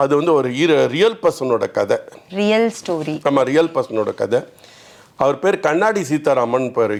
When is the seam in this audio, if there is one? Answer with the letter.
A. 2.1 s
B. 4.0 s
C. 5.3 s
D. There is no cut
D